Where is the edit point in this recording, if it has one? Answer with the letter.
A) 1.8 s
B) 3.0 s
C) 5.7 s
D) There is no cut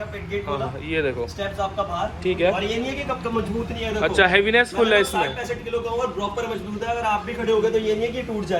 D